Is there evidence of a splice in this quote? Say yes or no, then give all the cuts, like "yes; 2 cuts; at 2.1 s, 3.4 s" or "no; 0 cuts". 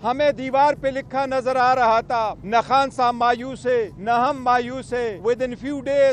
yes; 3 cuts; at 2.4 s, 3.9 s, 5.1 s